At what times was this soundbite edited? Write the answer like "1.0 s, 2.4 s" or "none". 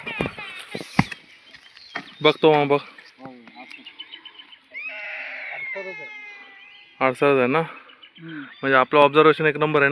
none